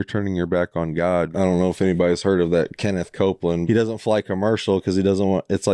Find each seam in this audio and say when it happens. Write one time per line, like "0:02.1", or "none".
0:01.3
0:03.6